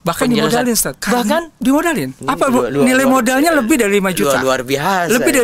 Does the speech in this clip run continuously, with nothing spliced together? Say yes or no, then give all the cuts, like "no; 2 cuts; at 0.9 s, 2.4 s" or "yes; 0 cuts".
no; 2 cuts; at 0.9 s, 2.1 s